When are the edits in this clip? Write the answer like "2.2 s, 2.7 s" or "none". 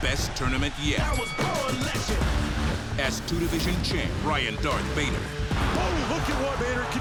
none